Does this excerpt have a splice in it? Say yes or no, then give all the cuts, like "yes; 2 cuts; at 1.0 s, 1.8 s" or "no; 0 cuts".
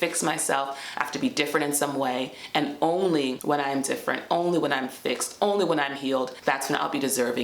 yes; 1 cut; at 6.3 s